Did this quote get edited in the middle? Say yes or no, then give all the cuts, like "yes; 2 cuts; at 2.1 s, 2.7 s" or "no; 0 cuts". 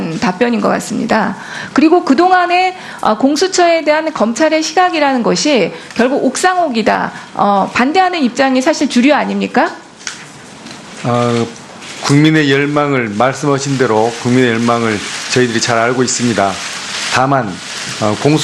yes; 1 cut; at 8.1 s